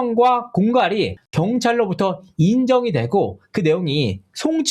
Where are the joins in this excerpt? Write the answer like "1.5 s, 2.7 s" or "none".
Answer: none